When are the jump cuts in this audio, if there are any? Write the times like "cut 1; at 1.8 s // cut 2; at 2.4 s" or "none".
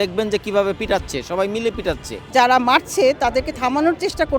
cut 1; at 2.3 s